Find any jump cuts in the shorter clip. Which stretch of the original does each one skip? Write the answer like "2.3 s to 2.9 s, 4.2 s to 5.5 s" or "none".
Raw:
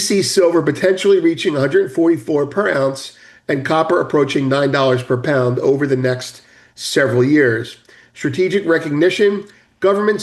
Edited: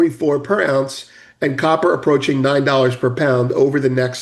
none

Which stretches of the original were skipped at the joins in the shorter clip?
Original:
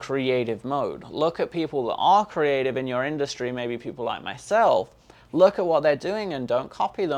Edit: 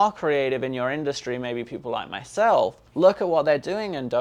5.0 s to 5.2 s

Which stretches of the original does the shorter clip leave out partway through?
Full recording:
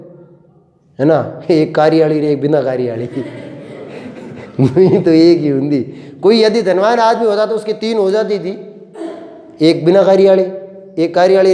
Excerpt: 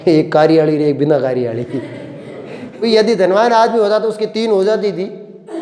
4.3 s to 6.3 s

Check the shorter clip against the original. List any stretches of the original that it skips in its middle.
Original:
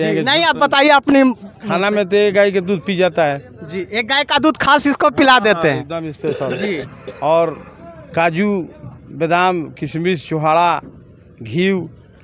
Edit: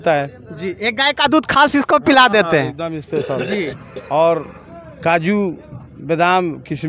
none

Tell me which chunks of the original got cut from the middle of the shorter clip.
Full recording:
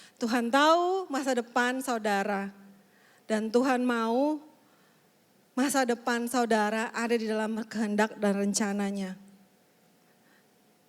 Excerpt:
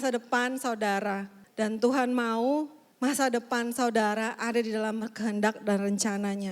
2.6 s to 3.1 s, 4.5 s to 5.4 s

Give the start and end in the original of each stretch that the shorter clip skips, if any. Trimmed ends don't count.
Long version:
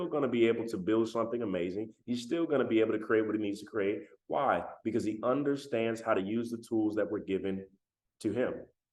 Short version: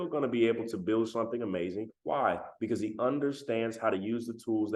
1.9 s to 4.1 s

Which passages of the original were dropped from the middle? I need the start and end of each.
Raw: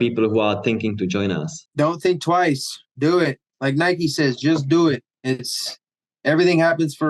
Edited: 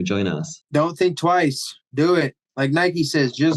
none

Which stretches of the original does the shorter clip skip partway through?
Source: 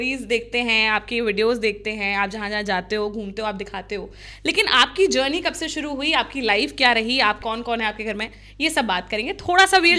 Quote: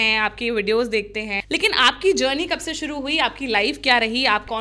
2.0 s to 4.3 s

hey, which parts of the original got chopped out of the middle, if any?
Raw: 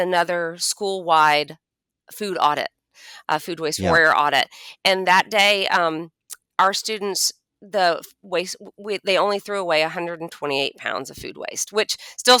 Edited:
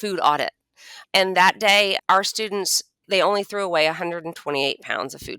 3.1 s to 4.6 s, 5.7 s to 6.5 s, 7.5 s to 9.0 s

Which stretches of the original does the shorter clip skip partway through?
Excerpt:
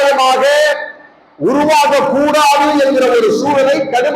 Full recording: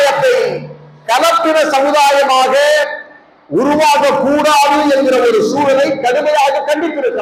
none

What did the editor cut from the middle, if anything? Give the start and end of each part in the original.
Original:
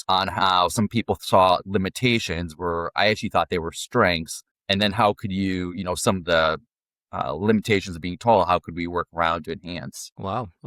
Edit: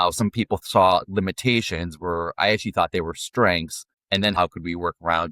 4.9 s to 8.5 s

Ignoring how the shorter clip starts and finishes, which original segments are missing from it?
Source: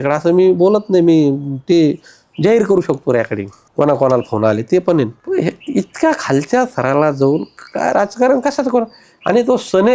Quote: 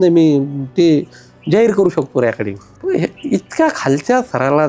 3.6 s to 5.2 s

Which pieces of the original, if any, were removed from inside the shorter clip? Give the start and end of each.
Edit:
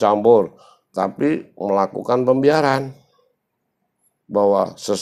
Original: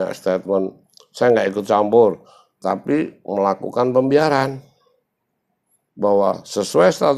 none

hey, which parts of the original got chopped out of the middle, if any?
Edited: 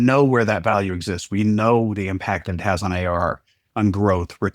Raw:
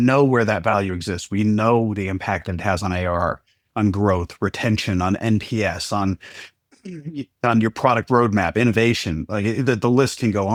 none

